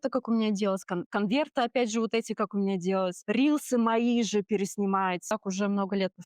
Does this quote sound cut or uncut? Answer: cut